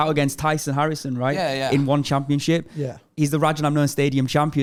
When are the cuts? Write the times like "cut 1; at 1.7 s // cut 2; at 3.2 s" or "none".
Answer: none